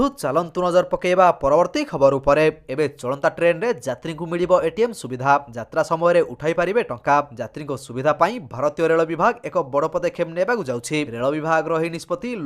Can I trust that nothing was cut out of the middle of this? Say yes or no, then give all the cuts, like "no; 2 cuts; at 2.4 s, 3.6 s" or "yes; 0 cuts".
no; 1 cut; at 2.6 s